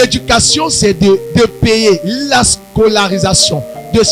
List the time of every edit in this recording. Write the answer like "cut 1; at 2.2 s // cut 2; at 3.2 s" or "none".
cut 1; at 1.3 s